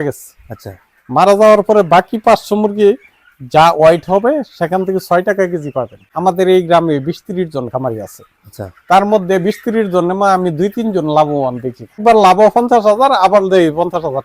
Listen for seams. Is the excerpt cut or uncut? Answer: cut